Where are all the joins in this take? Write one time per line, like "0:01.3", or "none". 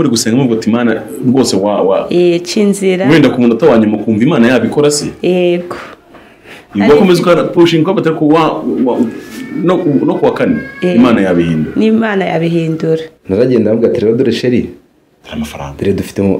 0:13.1